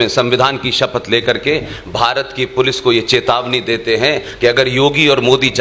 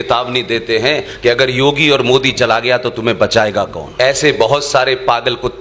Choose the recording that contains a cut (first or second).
second